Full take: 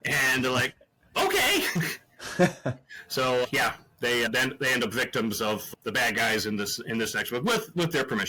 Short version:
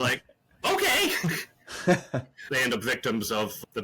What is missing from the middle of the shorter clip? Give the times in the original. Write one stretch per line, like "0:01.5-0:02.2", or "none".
0:03.0-0:04.6